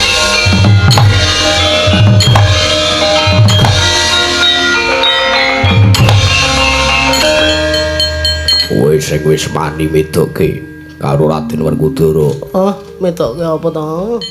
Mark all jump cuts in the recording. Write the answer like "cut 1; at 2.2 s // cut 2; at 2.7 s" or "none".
cut 1; at 7.2 s